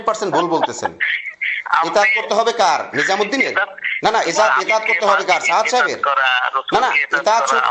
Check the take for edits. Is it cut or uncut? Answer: uncut